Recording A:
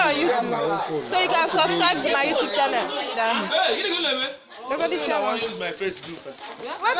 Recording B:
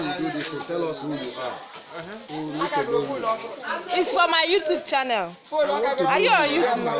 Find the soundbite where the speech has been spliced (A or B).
A